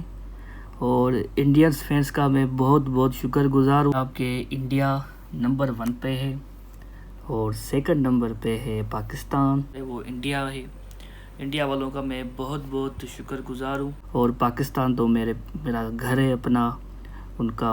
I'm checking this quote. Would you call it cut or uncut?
cut